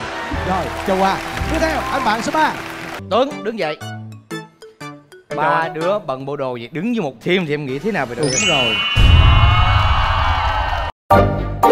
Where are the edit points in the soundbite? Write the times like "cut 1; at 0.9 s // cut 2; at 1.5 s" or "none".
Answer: cut 1; at 2.9 s